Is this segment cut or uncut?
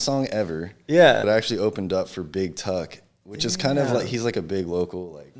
cut